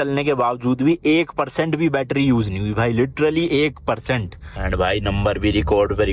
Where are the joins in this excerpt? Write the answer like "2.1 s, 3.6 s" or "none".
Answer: 4.6 s